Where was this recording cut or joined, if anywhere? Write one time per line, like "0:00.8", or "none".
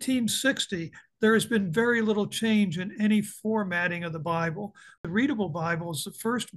0:05.0